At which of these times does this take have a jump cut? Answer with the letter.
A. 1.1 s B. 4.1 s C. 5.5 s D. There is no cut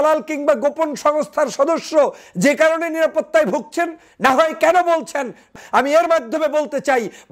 C